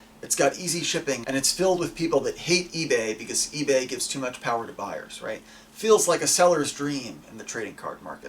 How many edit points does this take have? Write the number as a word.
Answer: one